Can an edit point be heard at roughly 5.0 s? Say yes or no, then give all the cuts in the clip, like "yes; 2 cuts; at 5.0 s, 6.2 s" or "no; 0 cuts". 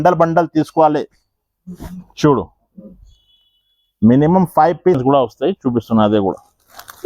yes; 1 cut; at 5.0 s